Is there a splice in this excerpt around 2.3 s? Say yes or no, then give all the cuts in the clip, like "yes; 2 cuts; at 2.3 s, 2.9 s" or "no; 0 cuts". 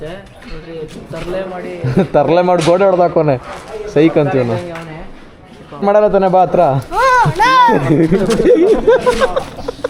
no; 1 cut; at 5.8 s